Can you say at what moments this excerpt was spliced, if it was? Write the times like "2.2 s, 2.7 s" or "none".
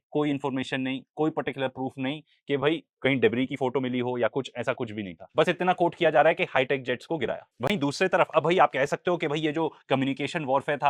none